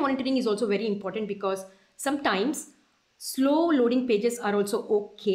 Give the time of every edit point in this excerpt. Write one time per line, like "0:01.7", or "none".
none